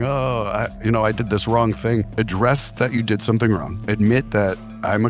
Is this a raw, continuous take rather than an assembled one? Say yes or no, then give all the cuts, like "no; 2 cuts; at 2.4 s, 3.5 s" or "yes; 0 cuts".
no; 2 cuts; at 2.1 s, 3.7 s